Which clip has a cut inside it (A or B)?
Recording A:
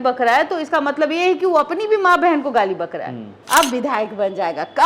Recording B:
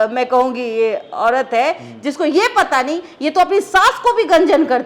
A